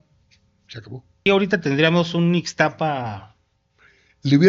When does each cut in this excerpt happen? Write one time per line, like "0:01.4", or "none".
0:01.3

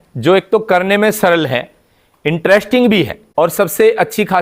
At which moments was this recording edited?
0:03.2

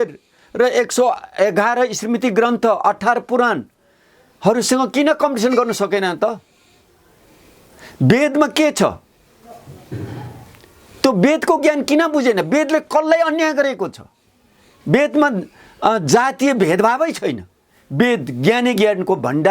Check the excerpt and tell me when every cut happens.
none

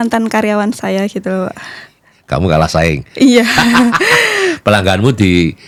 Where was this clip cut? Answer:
none

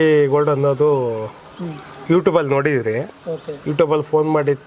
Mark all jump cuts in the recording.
none

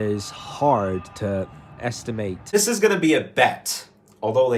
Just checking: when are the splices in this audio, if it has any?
0:02.5

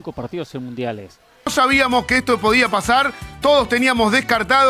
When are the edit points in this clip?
0:01.5

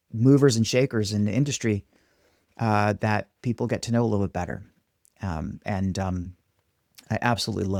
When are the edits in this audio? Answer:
none

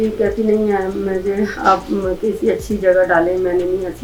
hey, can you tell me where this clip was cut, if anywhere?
none

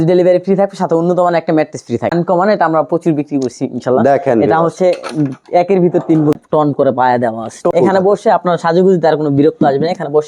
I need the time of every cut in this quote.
0:02.1
0:06.4
0:07.7

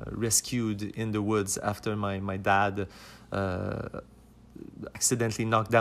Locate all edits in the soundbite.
0:04.9

